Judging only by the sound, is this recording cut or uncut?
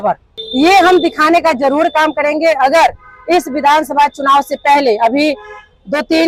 uncut